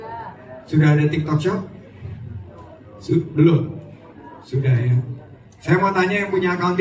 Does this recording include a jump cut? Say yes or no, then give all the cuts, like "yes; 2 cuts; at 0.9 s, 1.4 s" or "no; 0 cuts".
no; 0 cuts